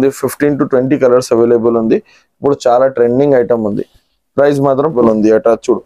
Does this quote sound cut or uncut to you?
cut